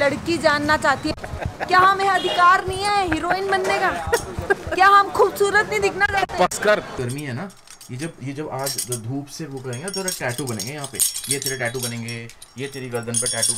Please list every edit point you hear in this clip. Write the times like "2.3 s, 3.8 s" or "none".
1.0 s, 6.9 s